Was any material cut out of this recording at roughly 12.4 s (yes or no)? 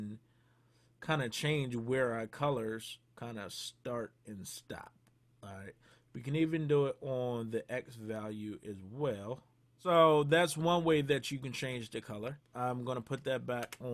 yes